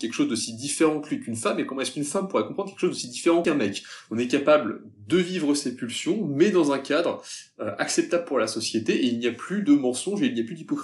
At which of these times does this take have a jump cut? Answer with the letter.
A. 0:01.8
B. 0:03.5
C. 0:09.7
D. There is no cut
B